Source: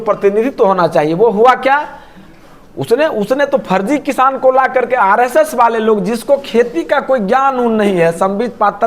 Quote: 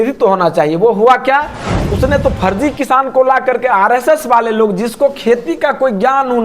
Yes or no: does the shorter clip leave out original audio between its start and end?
yes